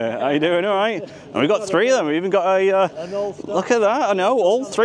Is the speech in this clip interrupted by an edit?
no; 0 cuts

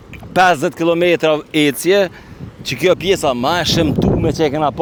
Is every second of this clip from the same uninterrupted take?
yes; 0 cuts

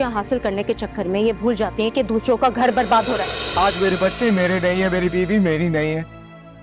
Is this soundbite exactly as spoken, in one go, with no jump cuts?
no; 1 cut; at 3.4 s

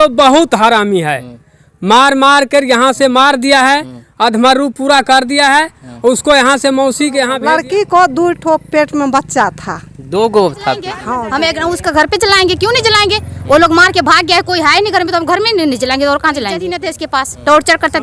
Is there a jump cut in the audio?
yes; 3 cuts; at 7.3 s, 11.0 s, 16.8 s

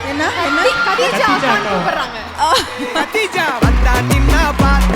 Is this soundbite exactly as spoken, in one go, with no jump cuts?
no; 1 cut; at 1.0 s

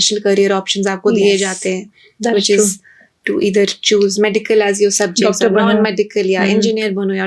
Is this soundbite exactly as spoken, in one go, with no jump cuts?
yes; 0 cuts

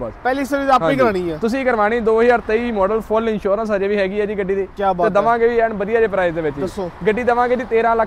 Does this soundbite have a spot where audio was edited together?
no; 0 cuts

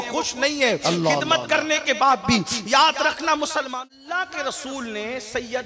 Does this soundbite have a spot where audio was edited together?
yes; 1 cut; at 3.7 s

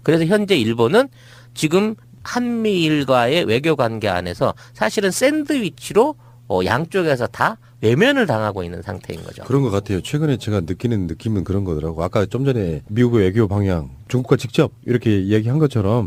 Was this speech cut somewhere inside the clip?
no; 0 cuts

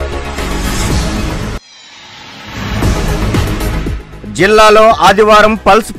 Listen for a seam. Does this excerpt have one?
yes; 1 cut; at 1.4 s

